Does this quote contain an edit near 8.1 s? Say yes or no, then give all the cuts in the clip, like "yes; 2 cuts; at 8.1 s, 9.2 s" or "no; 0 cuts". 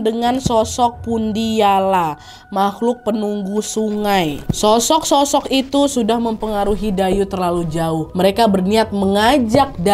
yes; 1 cut; at 8.1 s